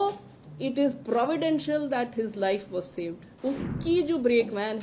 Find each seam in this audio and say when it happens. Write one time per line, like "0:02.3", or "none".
0:03.3